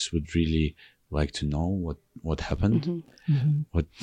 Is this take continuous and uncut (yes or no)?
yes